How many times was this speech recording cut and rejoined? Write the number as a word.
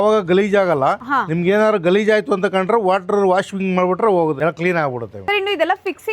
zero